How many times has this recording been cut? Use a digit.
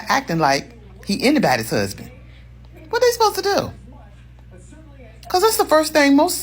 1